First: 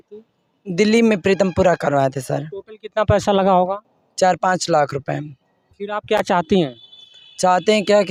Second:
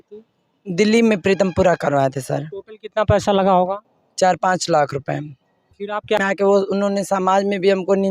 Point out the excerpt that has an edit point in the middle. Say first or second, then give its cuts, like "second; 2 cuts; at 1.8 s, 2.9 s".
second; 1 cut; at 6.2 s